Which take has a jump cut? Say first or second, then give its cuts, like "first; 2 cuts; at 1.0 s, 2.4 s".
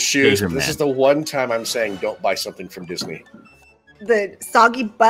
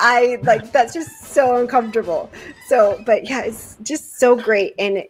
first; 1 cut; at 3.9 s